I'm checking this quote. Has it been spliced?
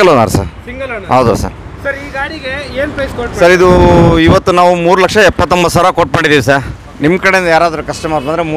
no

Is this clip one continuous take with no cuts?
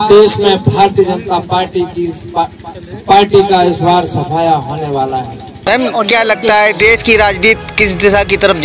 no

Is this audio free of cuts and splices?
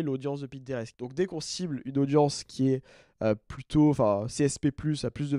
no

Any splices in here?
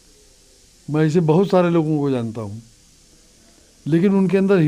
no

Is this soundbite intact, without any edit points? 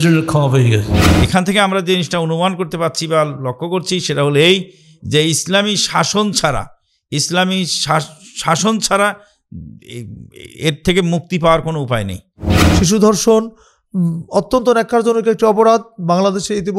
no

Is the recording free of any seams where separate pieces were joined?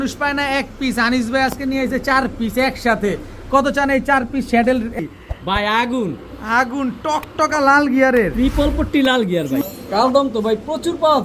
no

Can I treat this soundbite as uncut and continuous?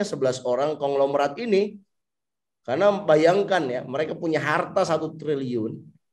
yes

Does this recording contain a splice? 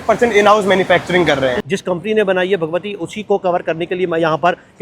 yes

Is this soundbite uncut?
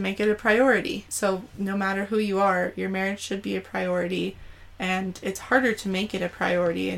no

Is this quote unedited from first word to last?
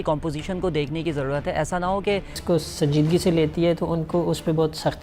no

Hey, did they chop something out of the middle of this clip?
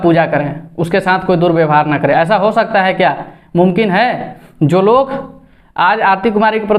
no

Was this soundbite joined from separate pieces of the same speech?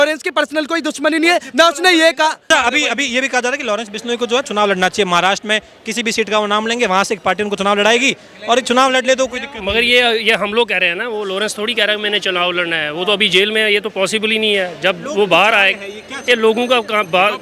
yes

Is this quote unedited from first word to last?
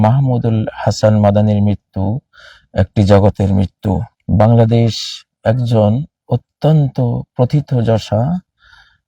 no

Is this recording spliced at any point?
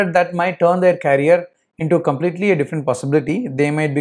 no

